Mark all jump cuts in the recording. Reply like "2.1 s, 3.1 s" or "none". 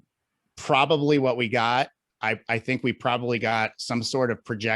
2.1 s